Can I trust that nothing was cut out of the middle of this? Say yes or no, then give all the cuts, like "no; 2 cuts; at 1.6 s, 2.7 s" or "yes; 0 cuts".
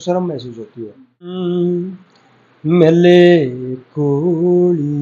no; 1 cut; at 1.3 s